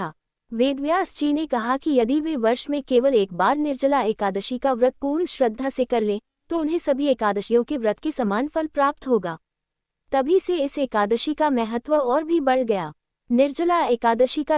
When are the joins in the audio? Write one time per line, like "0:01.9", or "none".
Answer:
0:11.8